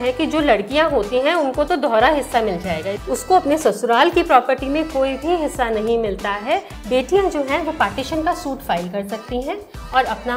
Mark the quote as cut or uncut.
cut